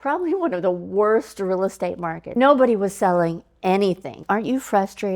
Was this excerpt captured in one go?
no; 2 cuts; at 2.2 s, 4.2 s

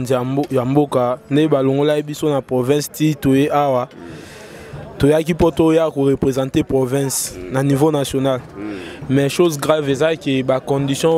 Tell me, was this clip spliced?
no; 0 cuts

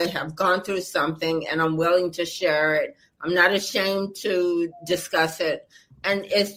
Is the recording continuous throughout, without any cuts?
yes; 0 cuts

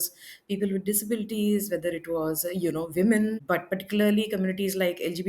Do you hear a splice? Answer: yes; 1 cut; at 3.4 s

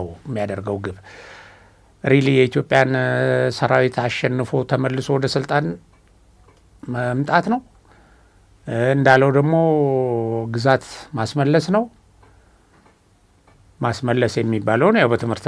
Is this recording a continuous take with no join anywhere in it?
yes; 0 cuts

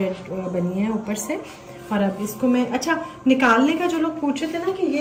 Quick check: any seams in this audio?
no; 0 cuts

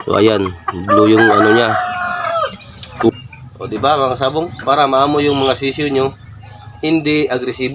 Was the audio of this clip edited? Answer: yes; 1 cut; at 3.1 s

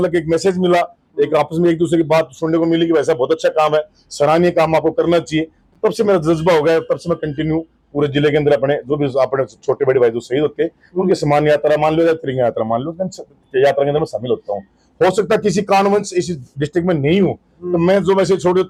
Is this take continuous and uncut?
yes; 0 cuts

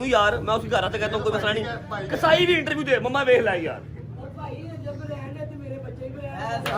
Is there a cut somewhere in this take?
no; 0 cuts

